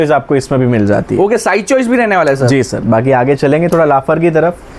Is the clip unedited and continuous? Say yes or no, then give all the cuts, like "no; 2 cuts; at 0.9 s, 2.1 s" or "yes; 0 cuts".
yes; 0 cuts